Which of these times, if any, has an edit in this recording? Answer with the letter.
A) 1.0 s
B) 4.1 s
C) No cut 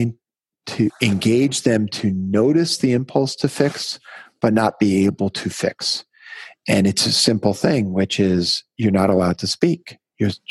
A